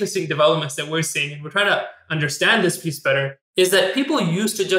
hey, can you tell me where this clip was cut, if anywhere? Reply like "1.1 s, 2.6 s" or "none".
3.4 s